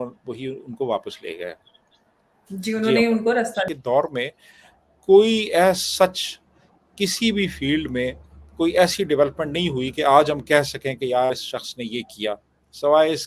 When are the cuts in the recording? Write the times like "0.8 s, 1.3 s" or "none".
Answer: 3.7 s